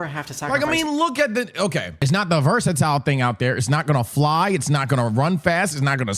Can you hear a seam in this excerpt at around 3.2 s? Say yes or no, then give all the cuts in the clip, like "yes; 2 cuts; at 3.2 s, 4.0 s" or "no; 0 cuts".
no; 1 cut; at 1.9 s